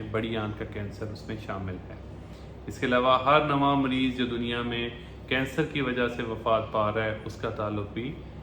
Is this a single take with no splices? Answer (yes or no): yes